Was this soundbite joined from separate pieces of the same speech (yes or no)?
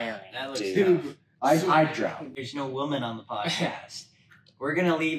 yes